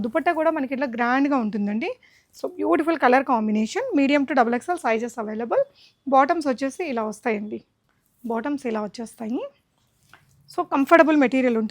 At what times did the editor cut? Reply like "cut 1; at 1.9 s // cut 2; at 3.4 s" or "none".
none